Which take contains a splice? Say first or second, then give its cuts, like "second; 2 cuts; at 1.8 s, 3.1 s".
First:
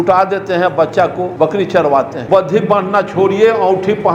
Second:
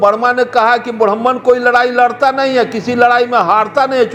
first; 2 cuts; at 1.3 s, 2.2 s